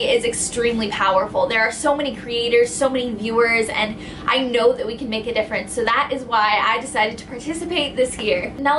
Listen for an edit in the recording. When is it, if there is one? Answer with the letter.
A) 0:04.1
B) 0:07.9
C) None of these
A